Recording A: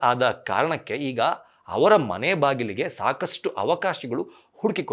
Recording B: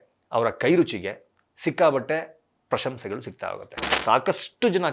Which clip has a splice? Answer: B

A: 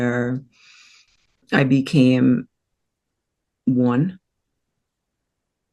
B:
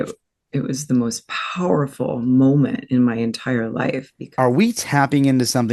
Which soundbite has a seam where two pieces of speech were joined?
B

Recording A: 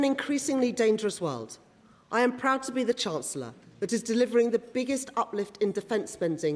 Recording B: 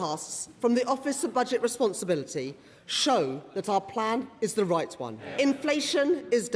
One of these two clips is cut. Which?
B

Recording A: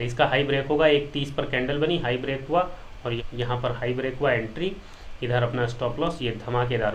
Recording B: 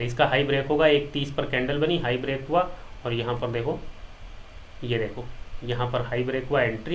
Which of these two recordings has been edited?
A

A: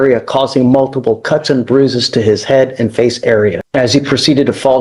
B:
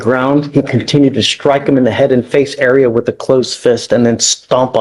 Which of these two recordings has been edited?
A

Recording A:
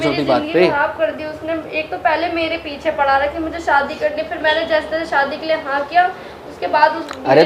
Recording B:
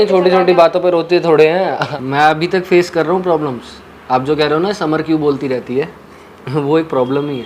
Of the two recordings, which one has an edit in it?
B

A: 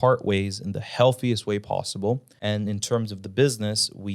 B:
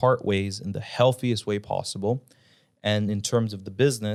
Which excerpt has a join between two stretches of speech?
A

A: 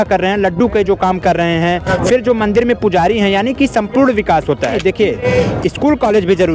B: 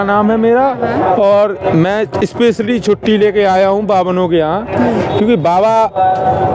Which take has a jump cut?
A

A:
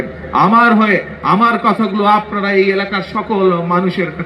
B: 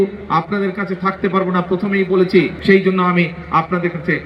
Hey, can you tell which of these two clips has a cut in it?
B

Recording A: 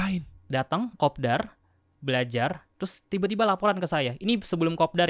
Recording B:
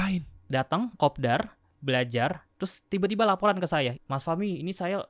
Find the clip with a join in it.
B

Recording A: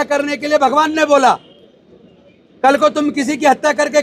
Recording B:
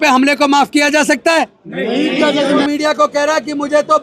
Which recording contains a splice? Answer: B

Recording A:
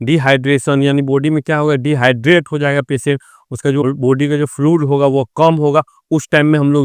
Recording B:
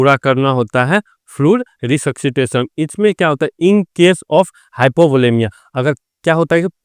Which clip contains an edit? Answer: A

